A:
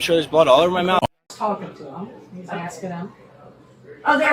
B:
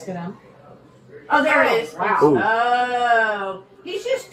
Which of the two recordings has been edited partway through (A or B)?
A